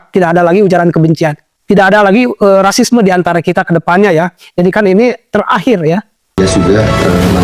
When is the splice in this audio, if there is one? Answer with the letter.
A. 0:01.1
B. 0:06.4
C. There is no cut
B